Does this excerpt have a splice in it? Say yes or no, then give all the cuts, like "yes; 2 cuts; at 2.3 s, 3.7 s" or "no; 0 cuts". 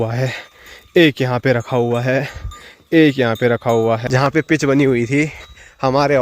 yes; 1 cut; at 4.0 s